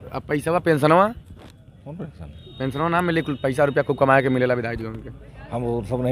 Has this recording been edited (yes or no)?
no